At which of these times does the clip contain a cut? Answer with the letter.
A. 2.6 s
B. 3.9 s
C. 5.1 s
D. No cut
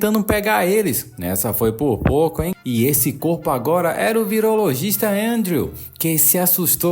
A